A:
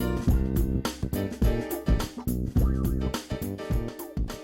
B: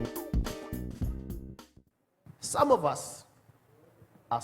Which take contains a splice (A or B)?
B